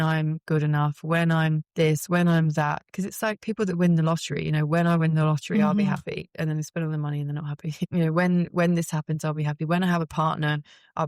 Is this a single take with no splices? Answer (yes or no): no